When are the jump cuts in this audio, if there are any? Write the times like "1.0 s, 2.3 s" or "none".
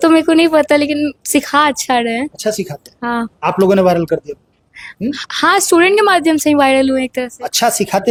none